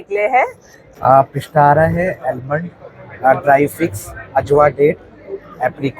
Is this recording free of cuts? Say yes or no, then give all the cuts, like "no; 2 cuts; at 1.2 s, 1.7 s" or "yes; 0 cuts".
no; 1 cut; at 0.9 s